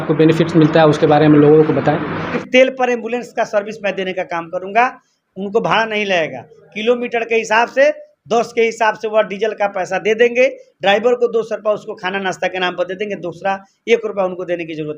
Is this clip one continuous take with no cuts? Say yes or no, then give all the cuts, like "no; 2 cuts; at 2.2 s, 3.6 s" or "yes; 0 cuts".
no; 1 cut; at 2.2 s